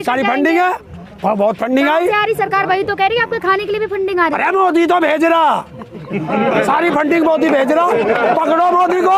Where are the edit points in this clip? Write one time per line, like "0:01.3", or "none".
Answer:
none